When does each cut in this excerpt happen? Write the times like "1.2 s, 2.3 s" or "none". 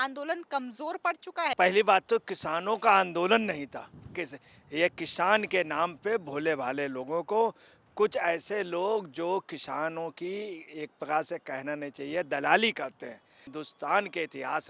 1.5 s, 4.0 s, 13.5 s

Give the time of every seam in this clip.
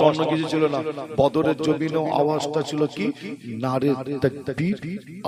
none

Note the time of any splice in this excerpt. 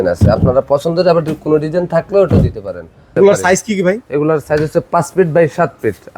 3.1 s

